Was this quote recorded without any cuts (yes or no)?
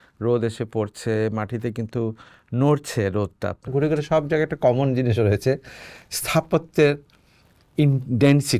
no